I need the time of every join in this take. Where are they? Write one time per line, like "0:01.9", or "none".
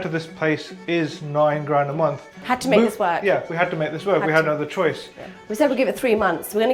0:02.5
0:05.4